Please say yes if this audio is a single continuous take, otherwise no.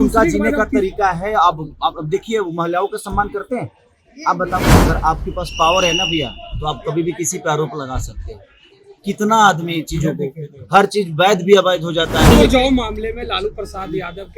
no